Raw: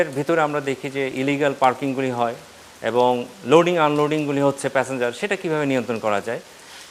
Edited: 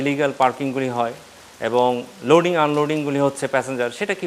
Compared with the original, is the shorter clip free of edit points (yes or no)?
yes